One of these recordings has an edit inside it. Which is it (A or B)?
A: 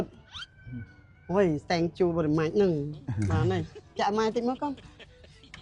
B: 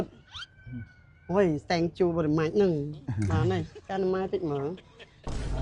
B